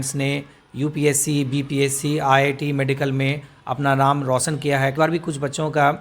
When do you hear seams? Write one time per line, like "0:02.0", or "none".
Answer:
0:04.9